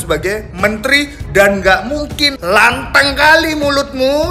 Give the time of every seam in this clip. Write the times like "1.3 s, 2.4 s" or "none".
none